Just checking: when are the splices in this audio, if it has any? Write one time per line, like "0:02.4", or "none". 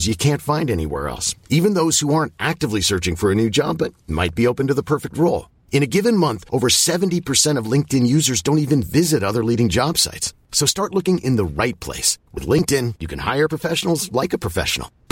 none